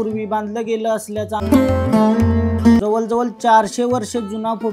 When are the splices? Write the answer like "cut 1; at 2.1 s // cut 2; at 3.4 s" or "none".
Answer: cut 1; at 1.4 s // cut 2; at 2.8 s